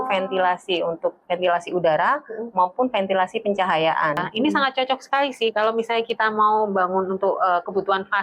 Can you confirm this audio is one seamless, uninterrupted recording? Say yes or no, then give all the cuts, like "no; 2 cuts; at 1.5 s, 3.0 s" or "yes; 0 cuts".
no; 1 cut; at 4.3 s